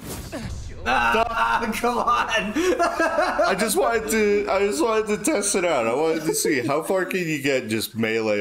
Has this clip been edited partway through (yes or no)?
no